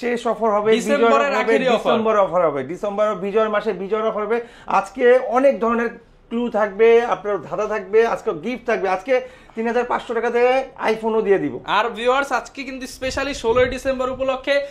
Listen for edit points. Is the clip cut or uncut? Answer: uncut